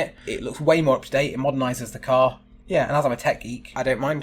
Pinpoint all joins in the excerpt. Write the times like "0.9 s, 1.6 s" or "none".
2.5 s